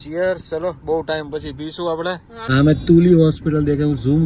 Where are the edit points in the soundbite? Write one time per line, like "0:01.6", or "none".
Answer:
0:02.5